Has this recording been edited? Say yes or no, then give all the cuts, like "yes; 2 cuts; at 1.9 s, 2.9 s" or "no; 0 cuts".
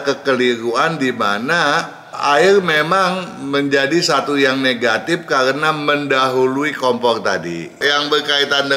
yes; 1 cut; at 7.8 s